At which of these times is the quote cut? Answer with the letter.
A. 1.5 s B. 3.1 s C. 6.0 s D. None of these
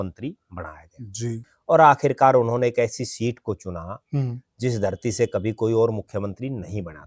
A